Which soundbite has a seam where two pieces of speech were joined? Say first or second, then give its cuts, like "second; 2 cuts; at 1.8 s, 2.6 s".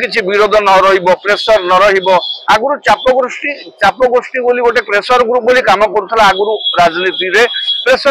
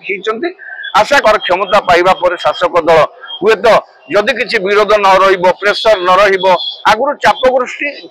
second; 1 cut; at 1.2 s